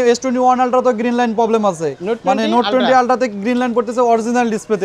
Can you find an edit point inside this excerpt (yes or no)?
yes